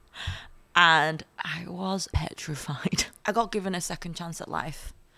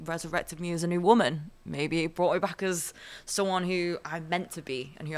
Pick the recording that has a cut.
first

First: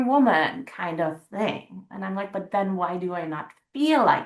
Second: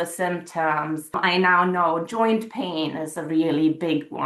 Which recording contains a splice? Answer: second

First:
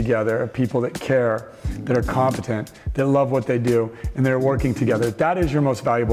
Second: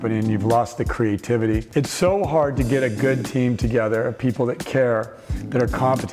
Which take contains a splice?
second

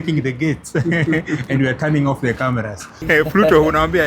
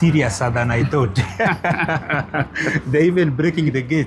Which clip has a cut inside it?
first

